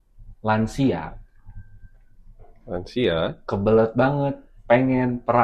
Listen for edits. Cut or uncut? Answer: uncut